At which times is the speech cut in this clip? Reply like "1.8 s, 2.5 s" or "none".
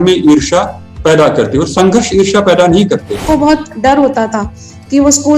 3.2 s